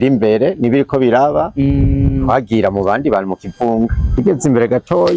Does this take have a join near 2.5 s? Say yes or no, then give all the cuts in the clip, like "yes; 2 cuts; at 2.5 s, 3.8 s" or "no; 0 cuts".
no; 1 cut; at 4.0 s